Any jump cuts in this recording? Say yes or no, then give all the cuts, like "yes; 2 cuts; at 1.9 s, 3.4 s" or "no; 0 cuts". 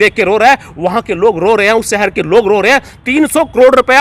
no; 0 cuts